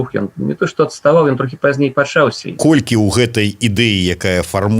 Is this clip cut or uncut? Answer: cut